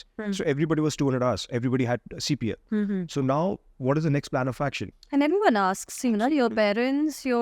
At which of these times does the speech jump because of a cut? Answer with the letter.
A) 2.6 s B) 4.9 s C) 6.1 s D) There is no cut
B